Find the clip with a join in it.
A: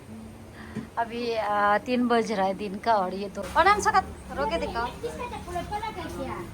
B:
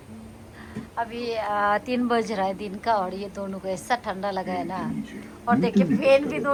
A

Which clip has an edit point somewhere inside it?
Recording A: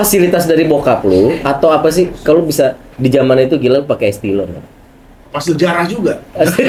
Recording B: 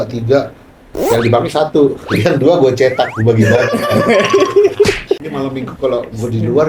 B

